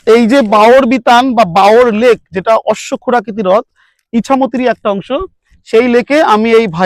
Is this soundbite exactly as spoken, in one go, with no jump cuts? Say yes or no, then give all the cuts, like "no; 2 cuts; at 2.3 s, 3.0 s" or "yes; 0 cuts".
yes; 0 cuts